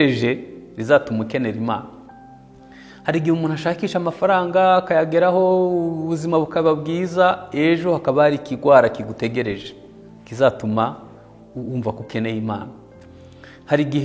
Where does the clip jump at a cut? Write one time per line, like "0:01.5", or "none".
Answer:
none

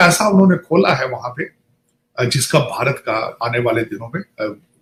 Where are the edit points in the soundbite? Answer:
none

